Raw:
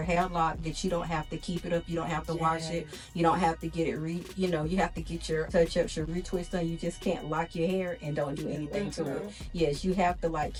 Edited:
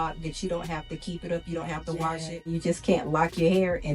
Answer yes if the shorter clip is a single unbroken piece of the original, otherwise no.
no